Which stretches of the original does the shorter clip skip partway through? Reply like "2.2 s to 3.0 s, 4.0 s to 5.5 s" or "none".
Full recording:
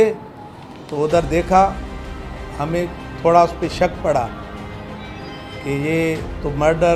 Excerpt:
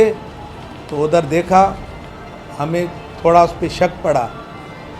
none